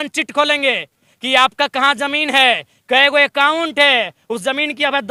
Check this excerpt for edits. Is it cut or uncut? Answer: uncut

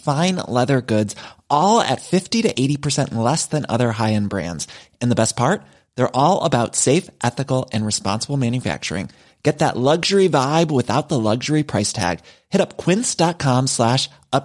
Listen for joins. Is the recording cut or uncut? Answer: uncut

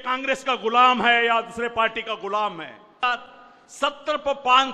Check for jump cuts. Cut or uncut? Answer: cut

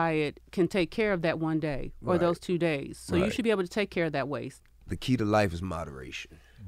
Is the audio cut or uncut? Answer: cut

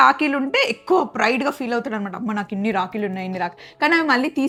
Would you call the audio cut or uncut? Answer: uncut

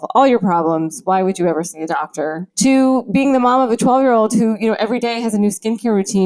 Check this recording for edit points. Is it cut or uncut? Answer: cut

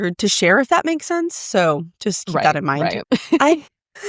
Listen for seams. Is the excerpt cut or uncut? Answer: cut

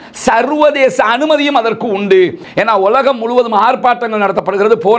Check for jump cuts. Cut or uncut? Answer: cut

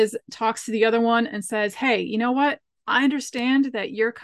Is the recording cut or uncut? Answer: uncut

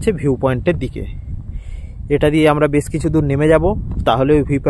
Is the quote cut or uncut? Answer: uncut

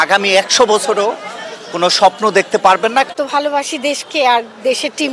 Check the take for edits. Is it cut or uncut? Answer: cut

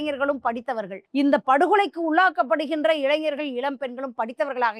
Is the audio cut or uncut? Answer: cut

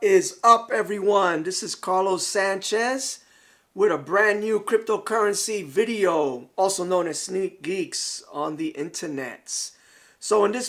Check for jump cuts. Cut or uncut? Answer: uncut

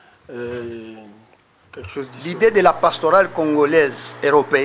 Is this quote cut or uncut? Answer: cut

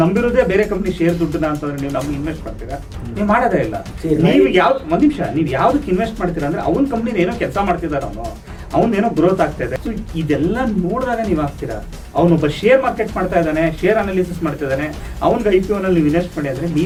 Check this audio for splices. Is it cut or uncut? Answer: uncut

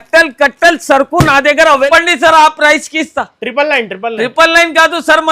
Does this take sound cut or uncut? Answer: cut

